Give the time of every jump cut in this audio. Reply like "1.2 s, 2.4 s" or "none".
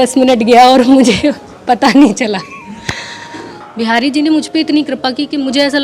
3.5 s